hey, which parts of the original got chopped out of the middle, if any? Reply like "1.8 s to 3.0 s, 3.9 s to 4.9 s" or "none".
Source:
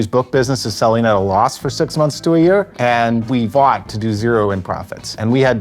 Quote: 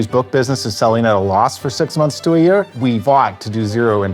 2.7 s to 3.2 s